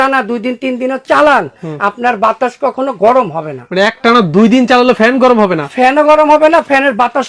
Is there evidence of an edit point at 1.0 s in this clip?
no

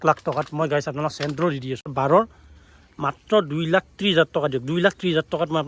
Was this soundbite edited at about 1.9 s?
yes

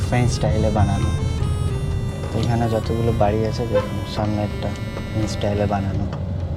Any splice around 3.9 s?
no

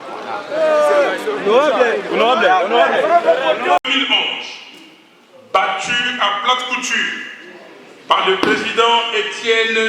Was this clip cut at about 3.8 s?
yes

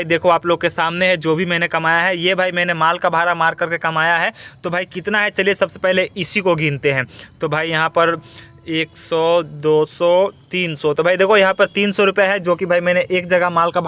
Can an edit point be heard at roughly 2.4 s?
no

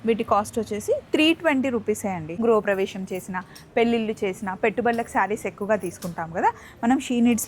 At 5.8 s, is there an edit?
no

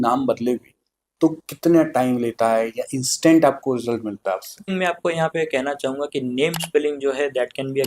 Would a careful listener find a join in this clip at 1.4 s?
no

